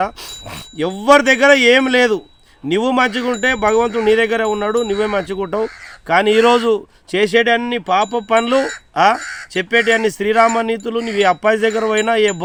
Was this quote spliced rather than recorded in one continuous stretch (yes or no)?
no